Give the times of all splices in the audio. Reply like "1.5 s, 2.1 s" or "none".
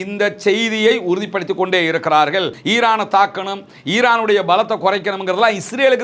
2.6 s